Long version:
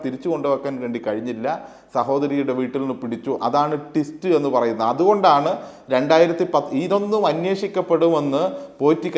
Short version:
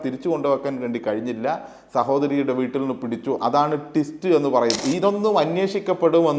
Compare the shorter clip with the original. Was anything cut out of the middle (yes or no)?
yes